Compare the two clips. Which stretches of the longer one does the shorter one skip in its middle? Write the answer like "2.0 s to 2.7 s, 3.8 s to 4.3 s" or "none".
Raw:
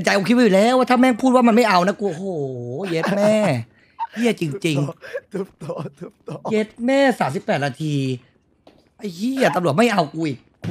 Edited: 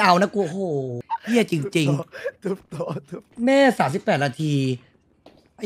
2.6 s to 3.8 s, 6.2 s to 6.7 s